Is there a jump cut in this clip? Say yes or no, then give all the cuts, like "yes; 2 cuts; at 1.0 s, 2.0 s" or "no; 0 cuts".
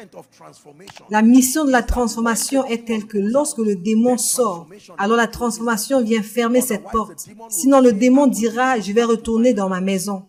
no; 0 cuts